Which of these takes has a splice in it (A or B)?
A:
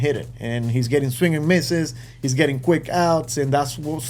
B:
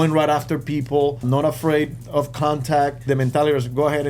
B